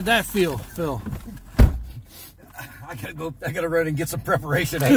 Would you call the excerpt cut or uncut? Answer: uncut